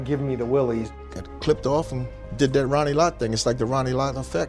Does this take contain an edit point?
no; 0 cuts

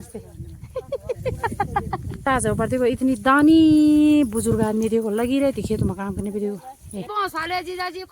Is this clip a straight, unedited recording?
no; 2 cuts; at 2.2 s, 7.1 s

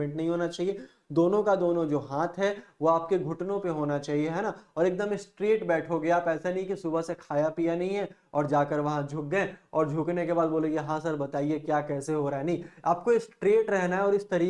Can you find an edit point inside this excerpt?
no; 0 cuts

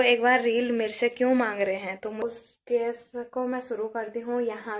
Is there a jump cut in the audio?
yes; 1 cut; at 2.2 s

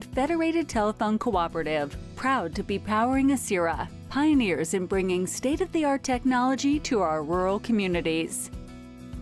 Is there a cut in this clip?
yes; 1 cut; at 8.3 s

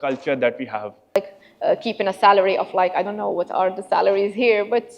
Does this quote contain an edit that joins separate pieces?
yes; 1 cut; at 1.2 s

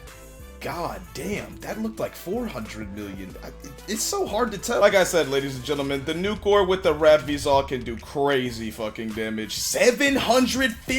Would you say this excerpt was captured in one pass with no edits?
no; 1 cut; at 4.8 s

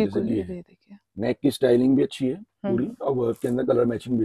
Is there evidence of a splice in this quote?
no; 0 cuts

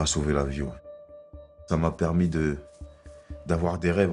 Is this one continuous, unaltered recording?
no; 1 cut; at 1.2 s

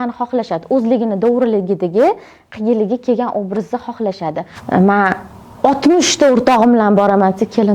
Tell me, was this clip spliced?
yes; 1 cut; at 4.5 s

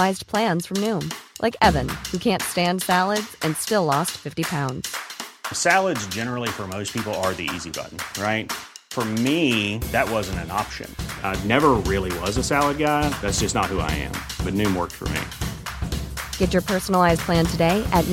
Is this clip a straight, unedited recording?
yes; 0 cuts

